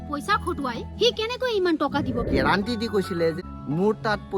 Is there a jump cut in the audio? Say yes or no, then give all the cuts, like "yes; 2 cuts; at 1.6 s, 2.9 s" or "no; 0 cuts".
yes; 2 cuts; at 2.3 s, 3.4 s